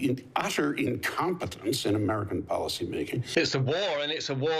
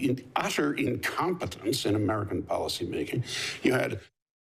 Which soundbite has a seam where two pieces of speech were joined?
first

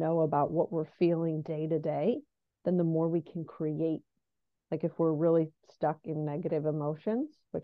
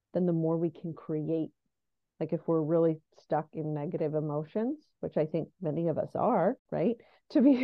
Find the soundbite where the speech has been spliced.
second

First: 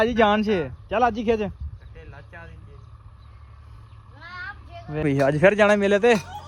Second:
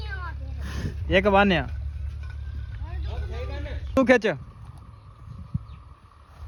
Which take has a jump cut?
first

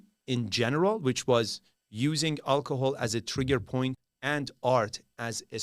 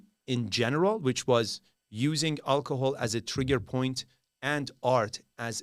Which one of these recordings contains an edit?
first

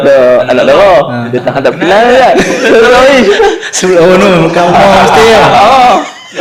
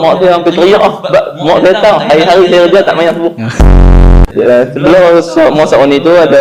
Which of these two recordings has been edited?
second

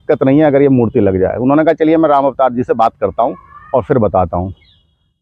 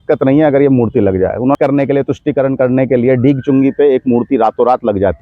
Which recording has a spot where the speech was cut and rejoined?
second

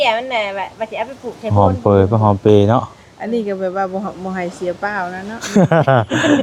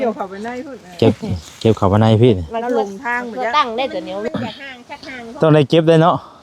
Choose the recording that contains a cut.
second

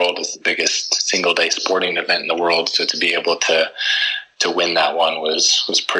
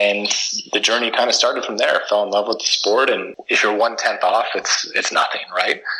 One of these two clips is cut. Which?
second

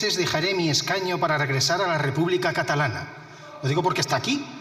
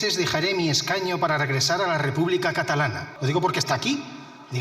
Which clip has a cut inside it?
second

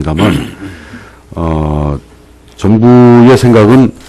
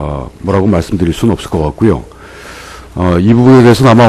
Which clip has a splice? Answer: first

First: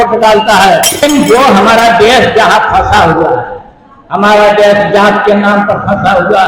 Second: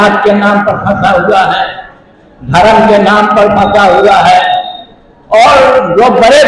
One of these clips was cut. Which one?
first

